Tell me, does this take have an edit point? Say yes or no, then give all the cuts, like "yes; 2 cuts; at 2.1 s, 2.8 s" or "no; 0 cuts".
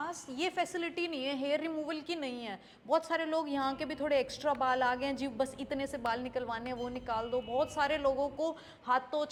no; 0 cuts